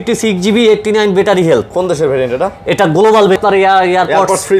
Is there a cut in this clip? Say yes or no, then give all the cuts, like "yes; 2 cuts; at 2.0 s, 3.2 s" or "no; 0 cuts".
yes; 1 cut; at 3.4 s